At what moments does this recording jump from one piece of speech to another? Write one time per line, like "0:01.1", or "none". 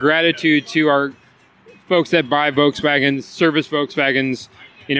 none